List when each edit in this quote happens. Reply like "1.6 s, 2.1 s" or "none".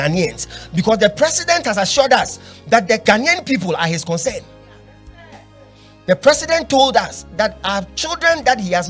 3.0 s